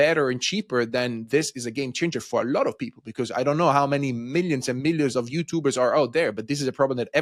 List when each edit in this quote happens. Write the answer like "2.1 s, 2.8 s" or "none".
none